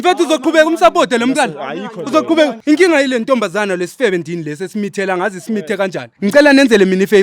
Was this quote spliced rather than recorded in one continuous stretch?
yes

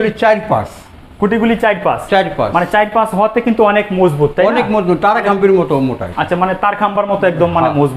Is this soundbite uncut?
yes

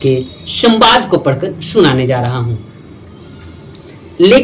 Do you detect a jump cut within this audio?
no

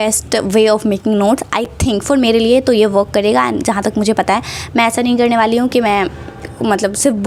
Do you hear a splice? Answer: no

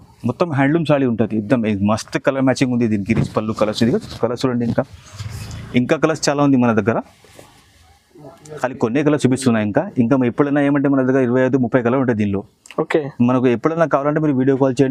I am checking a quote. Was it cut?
no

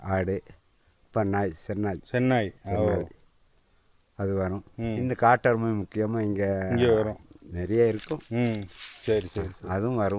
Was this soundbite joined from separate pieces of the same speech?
no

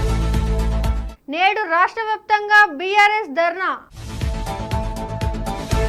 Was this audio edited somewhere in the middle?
no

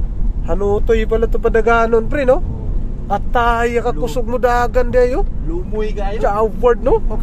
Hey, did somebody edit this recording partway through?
no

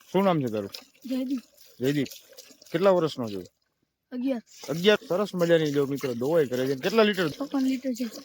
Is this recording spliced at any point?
yes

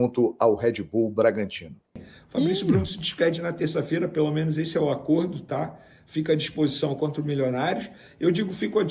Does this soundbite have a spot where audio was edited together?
yes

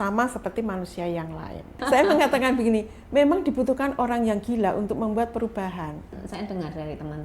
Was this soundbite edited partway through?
yes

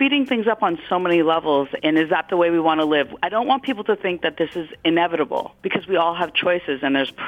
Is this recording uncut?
yes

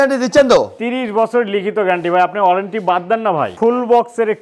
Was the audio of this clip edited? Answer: yes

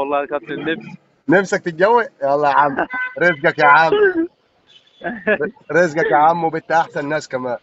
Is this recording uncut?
yes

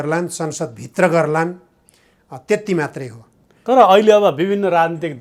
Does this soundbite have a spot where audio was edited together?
no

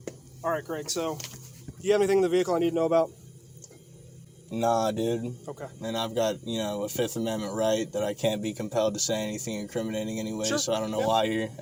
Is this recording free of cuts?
yes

